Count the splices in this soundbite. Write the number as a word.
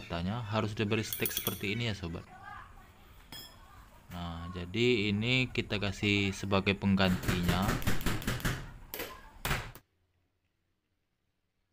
one